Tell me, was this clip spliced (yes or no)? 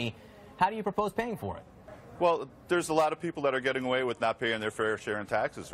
yes